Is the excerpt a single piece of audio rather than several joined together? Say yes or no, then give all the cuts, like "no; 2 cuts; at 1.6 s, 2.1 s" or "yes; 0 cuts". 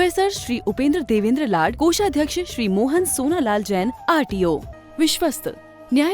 no; 1 cut; at 4.7 s